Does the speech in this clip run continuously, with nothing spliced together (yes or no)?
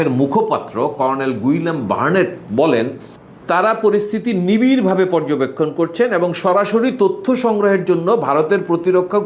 yes